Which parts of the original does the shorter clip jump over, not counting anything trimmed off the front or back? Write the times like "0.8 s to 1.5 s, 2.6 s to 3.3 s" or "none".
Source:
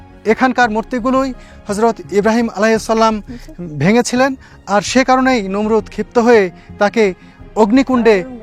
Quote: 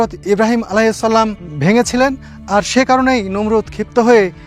3.3 s to 3.6 s